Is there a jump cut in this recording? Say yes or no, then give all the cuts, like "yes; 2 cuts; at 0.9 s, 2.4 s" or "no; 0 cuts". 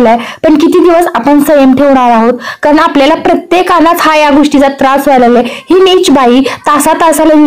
no; 0 cuts